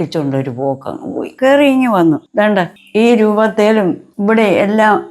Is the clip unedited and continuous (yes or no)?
no